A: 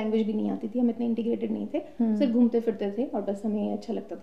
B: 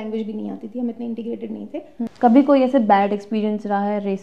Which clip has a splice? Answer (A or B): B